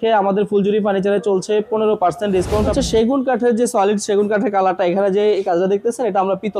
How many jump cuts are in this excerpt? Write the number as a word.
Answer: one